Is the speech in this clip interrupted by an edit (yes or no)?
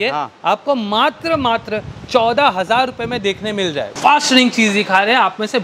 no